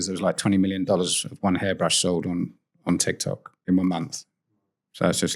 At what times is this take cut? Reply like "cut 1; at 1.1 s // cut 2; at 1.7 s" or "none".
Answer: cut 1; at 3.5 s